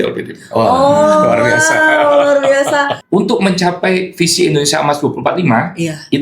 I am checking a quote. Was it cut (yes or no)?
yes